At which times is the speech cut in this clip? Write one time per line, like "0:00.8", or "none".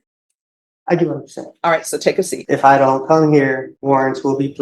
0:02.3
0:03.7